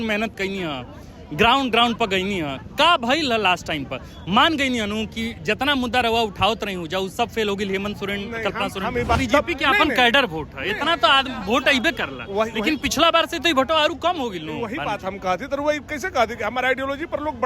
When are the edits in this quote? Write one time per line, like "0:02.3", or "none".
0:09.2